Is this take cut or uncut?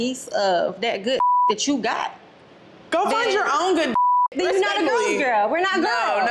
uncut